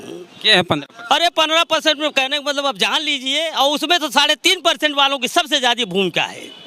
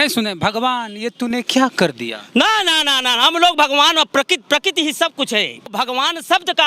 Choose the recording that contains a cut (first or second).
second